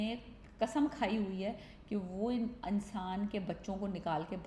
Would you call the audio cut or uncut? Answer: uncut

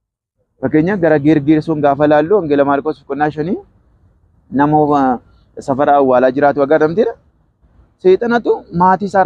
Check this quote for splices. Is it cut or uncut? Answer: uncut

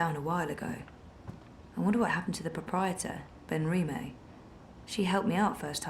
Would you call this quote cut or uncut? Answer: uncut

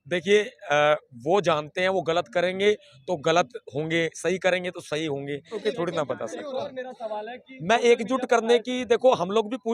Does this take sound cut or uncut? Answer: cut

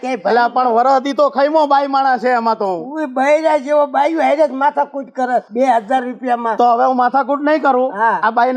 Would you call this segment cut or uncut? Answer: uncut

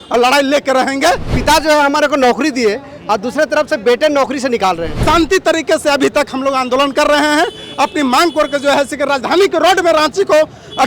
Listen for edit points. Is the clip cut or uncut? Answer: cut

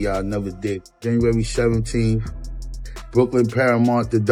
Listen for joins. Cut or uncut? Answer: uncut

